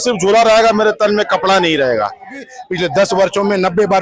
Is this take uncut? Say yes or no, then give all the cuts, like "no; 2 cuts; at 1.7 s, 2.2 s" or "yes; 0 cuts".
no; 1 cut; at 2.5 s